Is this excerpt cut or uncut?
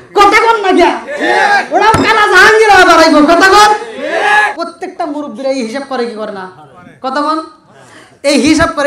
cut